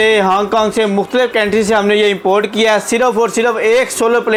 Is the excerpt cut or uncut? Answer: uncut